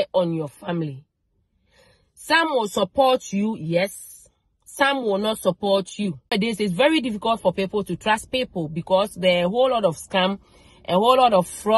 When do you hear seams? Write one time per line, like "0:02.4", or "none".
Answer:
0:06.3

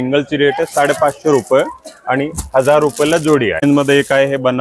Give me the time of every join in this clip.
0:03.6

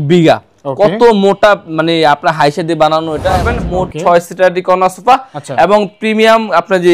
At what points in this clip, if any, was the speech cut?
0:03.6

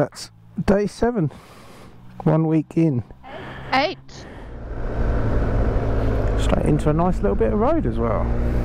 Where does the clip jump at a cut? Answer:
0:04.6

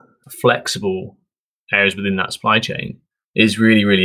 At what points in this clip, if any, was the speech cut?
none

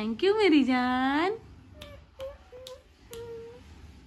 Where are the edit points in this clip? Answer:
none

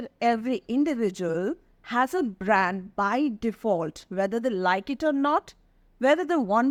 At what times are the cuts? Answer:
none

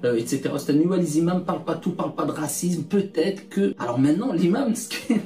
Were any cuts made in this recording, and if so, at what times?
0:03.8

